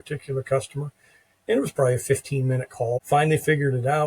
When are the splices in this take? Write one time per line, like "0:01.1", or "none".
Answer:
0:03.0